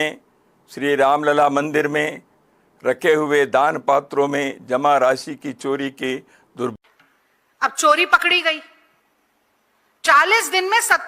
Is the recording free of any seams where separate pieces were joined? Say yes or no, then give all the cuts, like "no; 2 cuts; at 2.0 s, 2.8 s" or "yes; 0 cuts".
no; 1 cut; at 6.7 s